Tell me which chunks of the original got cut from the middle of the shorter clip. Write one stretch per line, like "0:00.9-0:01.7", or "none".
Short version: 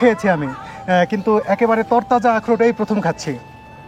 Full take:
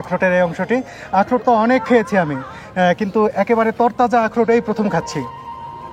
none